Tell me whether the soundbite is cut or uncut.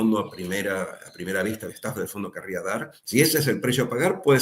cut